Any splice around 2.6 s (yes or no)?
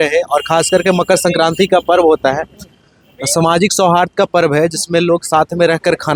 no